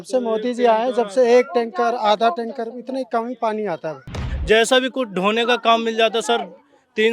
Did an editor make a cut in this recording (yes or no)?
yes